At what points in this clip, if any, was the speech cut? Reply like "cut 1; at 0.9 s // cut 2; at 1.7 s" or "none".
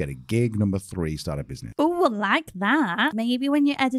cut 1; at 1.5 s // cut 2; at 3.1 s